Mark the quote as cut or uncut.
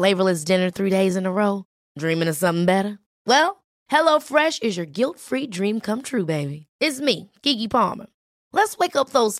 uncut